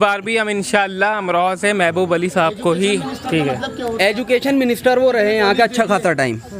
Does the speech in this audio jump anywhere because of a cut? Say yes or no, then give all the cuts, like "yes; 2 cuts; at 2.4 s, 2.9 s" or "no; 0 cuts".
no; 0 cuts